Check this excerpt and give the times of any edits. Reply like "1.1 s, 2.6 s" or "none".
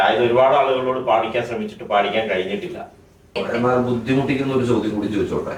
3.4 s